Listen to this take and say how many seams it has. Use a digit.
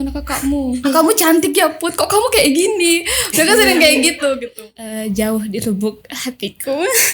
1